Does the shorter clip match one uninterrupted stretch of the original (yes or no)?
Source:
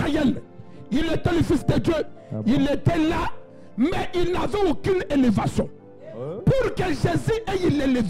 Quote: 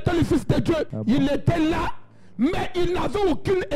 no